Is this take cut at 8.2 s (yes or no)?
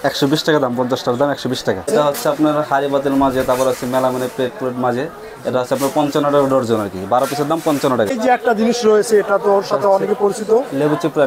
yes